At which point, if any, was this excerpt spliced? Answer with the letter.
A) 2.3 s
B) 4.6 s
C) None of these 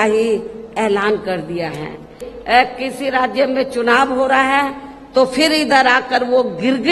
A